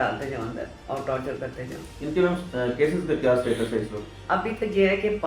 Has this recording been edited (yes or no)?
no